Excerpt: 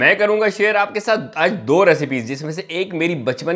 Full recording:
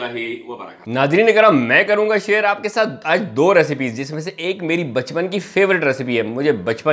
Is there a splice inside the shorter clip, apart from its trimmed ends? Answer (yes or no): no